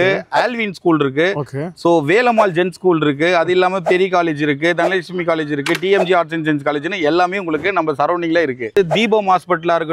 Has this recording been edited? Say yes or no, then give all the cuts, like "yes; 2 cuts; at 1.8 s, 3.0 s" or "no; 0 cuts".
yes; 1 cut; at 8.7 s